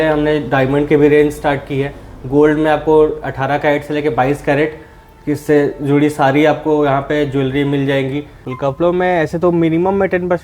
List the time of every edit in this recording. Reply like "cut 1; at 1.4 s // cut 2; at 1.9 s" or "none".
cut 1; at 8.4 s

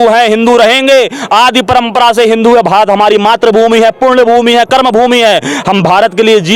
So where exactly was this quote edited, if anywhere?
none

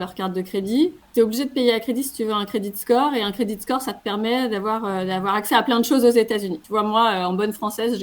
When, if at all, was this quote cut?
cut 1; at 1.0 s // cut 2; at 6.6 s

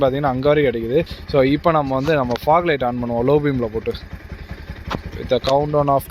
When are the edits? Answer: cut 1; at 1.2 s

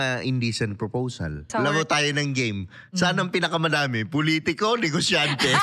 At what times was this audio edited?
cut 1; at 1.5 s

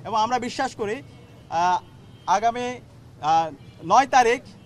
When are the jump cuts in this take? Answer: none

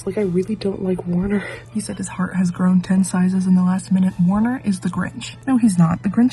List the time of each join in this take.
cut 1; at 1.5 s // cut 2; at 5.3 s

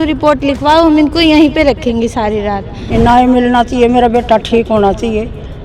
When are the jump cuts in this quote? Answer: cut 1; at 2.8 s

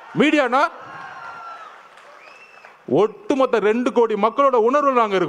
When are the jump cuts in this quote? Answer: none

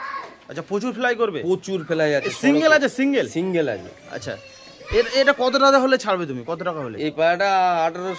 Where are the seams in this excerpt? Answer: none

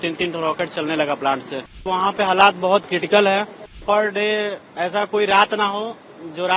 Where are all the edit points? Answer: cut 1; at 1.9 s // cut 2; at 3.7 s

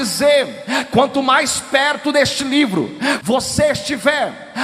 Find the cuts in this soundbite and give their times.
cut 1; at 3.2 s

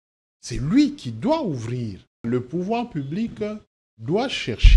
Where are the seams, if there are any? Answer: cut 1; at 2.2 s

